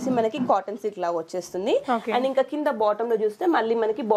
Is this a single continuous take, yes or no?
yes